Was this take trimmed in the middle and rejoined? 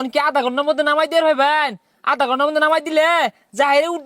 no; 0 cuts

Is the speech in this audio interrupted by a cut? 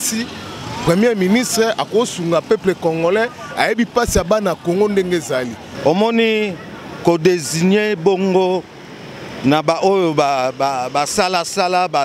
yes; 1 cut; at 5.6 s

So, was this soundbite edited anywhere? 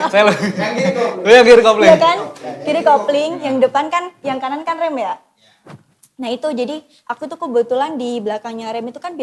no; 0 cuts

